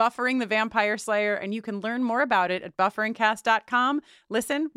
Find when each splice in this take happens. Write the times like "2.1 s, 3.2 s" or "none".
none